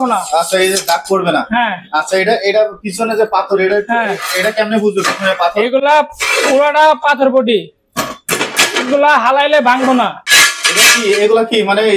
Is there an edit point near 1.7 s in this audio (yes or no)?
no